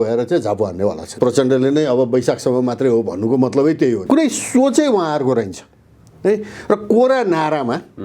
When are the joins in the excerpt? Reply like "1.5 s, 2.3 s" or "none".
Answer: 1.1 s, 4.0 s